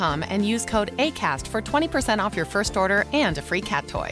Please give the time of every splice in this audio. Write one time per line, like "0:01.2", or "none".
none